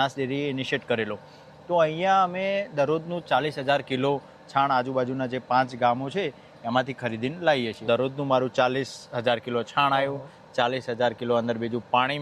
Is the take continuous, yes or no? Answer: no